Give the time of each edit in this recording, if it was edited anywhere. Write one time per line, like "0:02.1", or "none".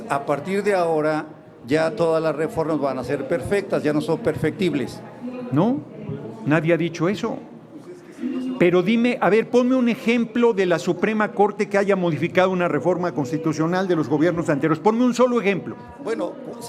none